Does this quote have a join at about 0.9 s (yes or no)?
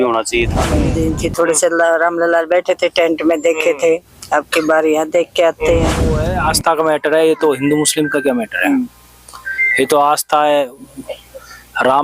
yes